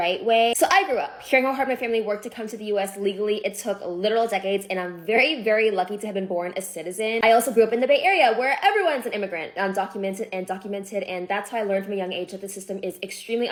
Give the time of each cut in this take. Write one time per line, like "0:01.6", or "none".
none